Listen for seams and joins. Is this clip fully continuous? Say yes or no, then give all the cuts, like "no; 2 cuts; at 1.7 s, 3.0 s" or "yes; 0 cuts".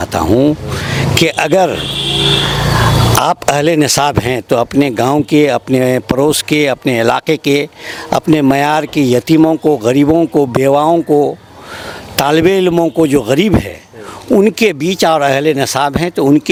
yes; 0 cuts